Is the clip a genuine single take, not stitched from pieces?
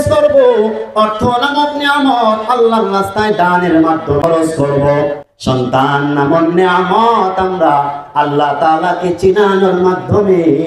no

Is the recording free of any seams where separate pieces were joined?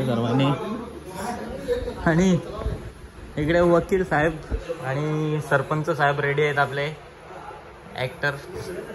yes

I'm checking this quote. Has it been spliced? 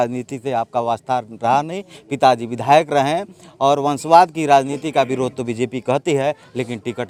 no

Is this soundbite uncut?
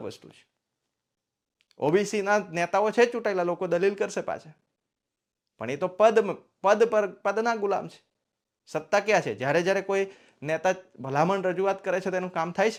yes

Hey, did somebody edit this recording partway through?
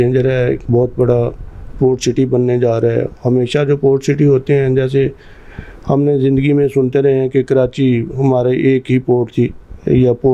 no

